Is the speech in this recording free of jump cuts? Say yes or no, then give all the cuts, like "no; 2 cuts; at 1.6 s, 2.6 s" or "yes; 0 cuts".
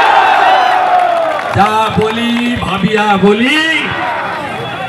yes; 0 cuts